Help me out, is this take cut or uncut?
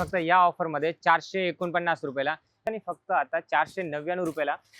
cut